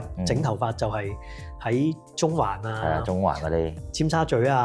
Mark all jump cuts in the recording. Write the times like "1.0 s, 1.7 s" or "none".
3.8 s